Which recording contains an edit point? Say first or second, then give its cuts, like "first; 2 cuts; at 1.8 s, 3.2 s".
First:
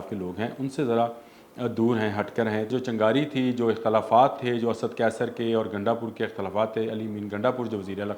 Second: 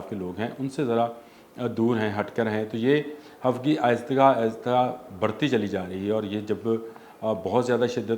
first; 1 cut; at 2.7 s